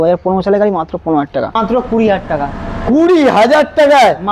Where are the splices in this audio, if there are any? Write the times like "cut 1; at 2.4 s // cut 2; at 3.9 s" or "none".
cut 1; at 1.6 s